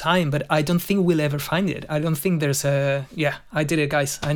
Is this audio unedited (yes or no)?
yes